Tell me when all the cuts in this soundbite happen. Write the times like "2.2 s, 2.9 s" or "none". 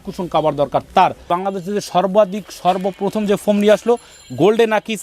1.3 s

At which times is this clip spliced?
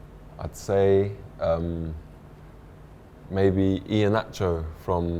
none

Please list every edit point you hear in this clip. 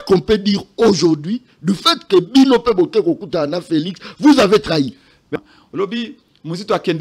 5.3 s

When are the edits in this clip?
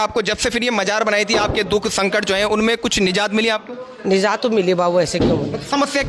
none

